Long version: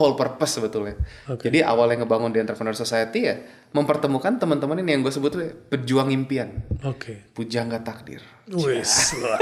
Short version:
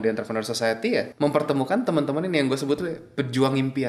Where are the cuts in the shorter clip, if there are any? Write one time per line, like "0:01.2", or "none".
0:01.1